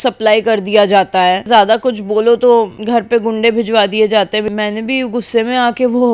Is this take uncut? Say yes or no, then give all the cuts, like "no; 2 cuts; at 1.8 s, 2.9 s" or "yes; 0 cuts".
no; 3 cuts; at 1.5 s, 2.8 s, 4.4 s